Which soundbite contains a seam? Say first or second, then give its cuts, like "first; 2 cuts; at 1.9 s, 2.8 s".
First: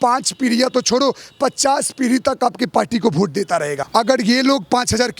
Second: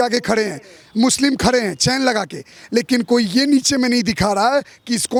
first; 1 cut; at 3.8 s